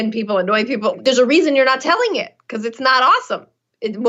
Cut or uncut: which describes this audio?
cut